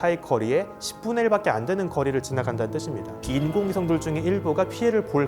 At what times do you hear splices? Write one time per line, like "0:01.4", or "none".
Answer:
0:03.2